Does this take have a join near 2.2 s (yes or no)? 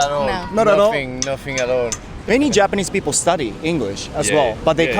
yes